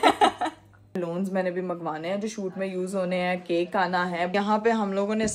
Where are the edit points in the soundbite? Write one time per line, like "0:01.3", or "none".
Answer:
0:01.0
0:04.3